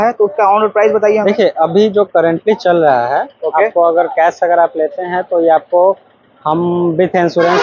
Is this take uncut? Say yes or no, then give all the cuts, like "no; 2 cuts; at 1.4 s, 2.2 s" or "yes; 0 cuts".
yes; 0 cuts